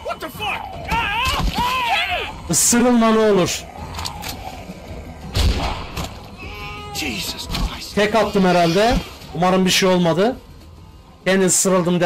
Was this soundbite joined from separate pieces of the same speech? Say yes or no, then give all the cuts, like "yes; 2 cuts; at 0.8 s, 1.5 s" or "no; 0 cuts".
no; 0 cuts